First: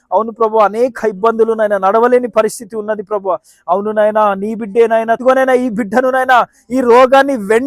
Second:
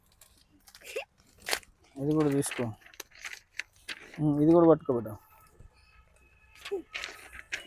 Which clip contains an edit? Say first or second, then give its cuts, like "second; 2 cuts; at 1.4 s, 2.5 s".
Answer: first; 1 cut; at 5.2 s